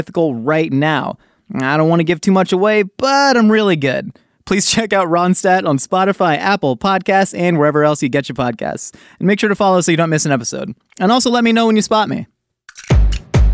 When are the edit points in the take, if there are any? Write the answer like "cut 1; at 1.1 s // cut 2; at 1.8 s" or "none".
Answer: cut 1; at 12.4 s